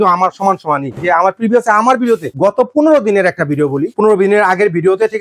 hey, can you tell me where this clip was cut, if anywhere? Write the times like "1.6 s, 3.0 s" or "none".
0.9 s, 2.3 s, 3.9 s